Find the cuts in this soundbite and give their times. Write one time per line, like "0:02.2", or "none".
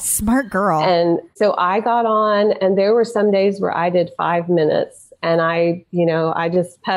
0:01.3